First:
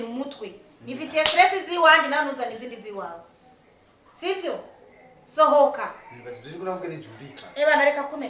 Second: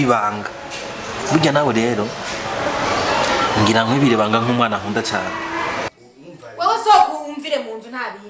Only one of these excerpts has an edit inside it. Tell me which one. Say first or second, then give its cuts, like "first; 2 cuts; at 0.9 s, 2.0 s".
second; 1 cut; at 5.9 s